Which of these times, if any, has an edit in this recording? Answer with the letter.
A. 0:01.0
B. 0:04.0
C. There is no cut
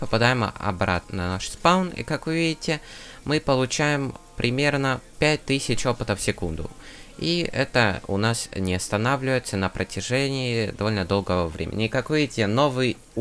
A